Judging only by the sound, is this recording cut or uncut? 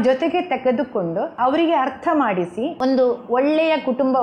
cut